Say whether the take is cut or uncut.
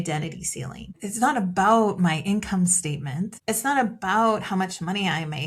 cut